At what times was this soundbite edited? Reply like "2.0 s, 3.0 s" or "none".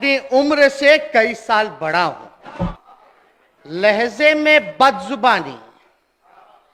2.8 s